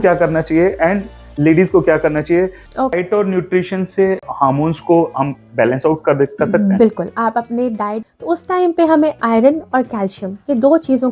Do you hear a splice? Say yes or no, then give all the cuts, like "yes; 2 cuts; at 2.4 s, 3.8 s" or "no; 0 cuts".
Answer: yes; 2 cuts; at 2.9 s, 7.9 s